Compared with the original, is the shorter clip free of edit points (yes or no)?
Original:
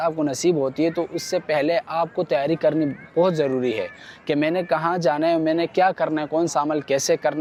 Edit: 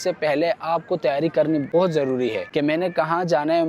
no